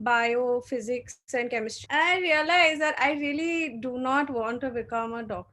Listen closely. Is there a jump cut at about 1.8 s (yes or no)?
yes